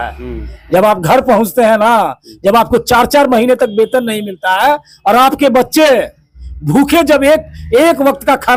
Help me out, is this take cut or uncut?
uncut